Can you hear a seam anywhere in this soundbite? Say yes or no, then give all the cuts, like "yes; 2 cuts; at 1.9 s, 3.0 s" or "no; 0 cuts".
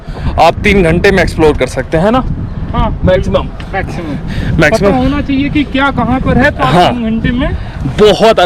no; 0 cuts